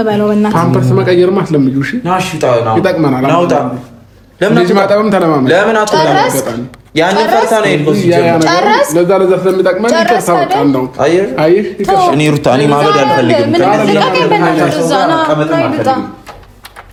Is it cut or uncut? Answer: uncut